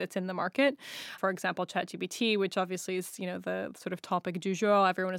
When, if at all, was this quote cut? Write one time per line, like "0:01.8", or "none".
0:01.2